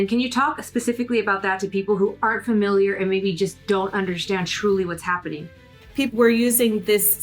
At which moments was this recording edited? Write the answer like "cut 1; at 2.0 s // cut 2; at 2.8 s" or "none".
cut 1; at 6.1 s